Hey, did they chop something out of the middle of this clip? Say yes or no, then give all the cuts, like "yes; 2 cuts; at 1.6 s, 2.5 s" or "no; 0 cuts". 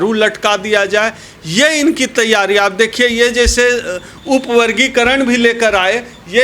no; 0 cuts